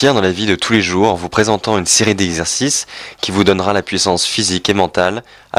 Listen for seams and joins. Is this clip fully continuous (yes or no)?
no